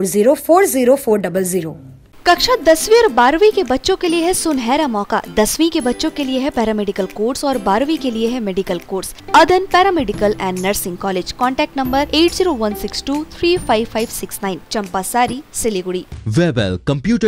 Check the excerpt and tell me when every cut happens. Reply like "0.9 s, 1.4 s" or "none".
9.2 s, 16.1 s